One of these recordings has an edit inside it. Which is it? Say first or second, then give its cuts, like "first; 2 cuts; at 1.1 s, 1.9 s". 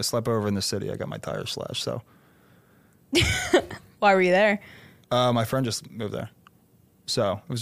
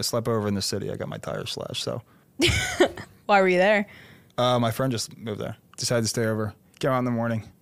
second; 2 cuts; at 2.2 s, 5.8 s